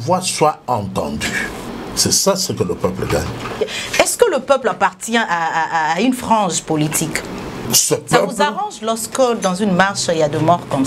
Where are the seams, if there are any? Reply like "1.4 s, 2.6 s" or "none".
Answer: 1.7 s, 3.6 s, 7.6 s